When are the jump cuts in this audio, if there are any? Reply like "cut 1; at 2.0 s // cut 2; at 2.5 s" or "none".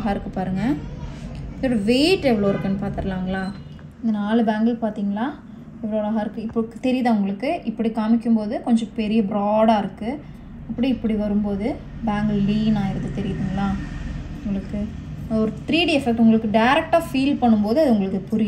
cut 1; at 3.8 s